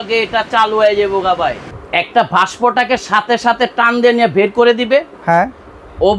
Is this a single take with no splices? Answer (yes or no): no